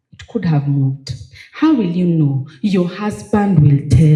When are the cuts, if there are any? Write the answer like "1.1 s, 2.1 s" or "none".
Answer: none